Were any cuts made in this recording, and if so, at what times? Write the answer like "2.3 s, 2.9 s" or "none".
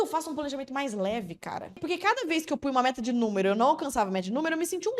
1.8 s